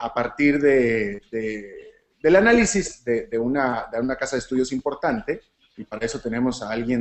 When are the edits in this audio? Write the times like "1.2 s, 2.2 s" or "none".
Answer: 1.1 s